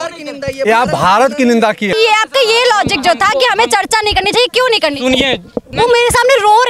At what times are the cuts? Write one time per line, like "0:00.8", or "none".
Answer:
0:01.9
0:05.7